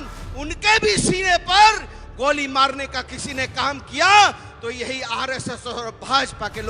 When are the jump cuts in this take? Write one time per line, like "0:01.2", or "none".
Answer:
none